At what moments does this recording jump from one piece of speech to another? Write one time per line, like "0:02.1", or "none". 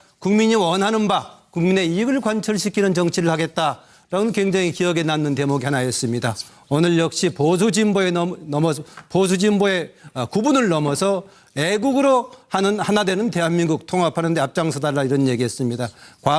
0:15.0